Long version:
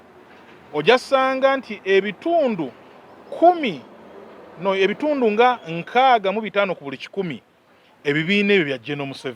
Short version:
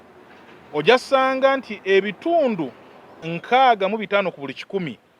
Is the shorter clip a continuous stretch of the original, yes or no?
no